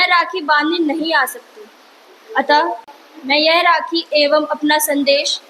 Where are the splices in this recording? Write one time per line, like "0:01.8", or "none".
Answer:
0:02.9